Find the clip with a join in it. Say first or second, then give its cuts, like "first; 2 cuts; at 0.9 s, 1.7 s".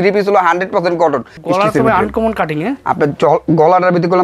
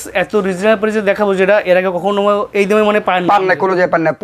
first; 1 cut; at 1.3 s